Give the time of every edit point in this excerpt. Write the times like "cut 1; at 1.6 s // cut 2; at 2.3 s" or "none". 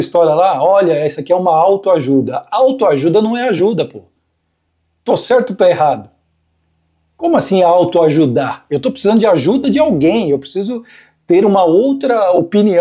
none